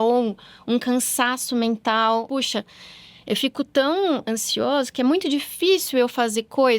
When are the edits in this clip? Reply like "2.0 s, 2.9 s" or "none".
2.3 s